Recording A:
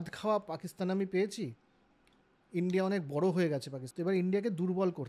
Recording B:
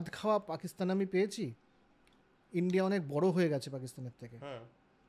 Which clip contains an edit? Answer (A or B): A